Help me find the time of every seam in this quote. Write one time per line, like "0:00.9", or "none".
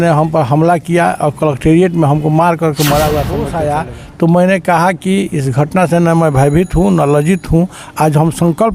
0:03.5